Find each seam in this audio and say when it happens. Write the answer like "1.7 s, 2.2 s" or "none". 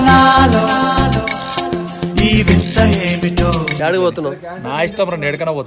3.8 s